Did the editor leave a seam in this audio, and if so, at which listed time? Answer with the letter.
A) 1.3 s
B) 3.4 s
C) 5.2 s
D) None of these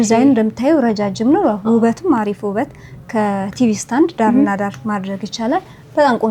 D